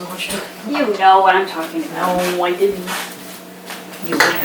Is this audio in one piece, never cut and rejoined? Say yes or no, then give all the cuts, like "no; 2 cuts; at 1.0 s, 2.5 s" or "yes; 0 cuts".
yes; 0 cuts